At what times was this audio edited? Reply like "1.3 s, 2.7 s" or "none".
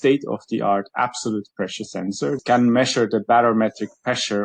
2.4 s